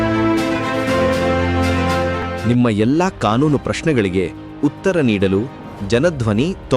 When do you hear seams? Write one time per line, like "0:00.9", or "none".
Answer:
0:02.3

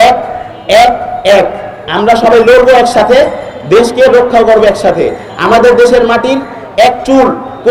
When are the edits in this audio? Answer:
none

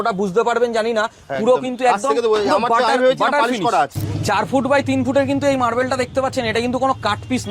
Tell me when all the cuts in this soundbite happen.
0:04.0

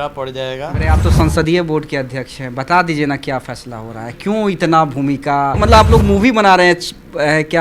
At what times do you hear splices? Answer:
0:00.8
0:05.6

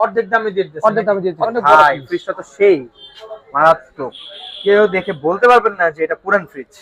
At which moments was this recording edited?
0:01.5

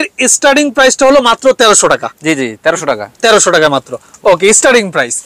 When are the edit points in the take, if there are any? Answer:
none

